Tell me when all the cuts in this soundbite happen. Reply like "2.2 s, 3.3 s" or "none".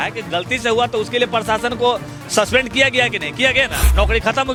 none